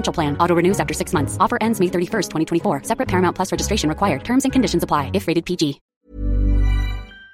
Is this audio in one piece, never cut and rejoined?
no; 1 cut; at 5.9 s

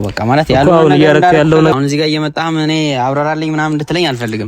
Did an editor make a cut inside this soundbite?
yes; 1 cut; at 1.7 s

